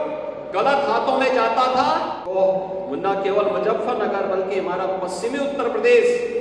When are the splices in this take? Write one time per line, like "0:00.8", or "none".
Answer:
0:02.2